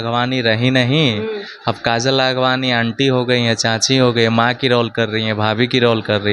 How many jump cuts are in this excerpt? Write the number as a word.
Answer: zero